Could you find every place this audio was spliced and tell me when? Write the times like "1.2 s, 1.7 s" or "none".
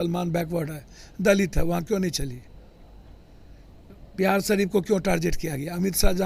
none